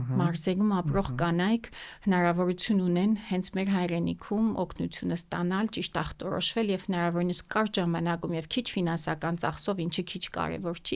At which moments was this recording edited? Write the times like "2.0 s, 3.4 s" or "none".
none